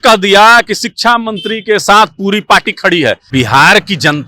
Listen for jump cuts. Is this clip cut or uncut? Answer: cut